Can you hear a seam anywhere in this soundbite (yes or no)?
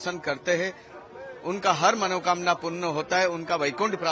no